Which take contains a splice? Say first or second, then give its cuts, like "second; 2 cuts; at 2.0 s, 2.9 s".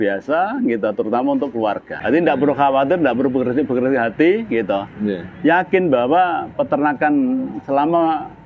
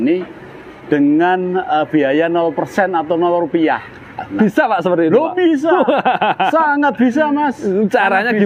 first; 1 cut; at 2.0 s